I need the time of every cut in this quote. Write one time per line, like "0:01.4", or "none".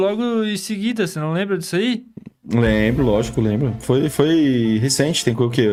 none